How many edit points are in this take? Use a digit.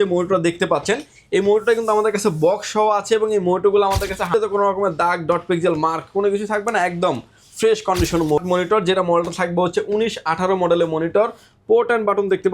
2